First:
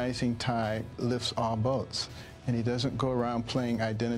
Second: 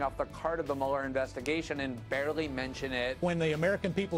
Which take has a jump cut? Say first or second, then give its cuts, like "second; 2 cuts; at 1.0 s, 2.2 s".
second; 1 cut; at 3.2 s